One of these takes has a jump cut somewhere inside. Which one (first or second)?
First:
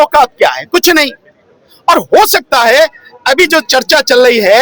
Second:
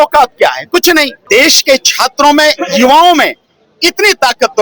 second